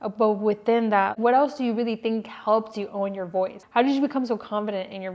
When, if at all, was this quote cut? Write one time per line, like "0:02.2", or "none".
0:01.2
0:03.6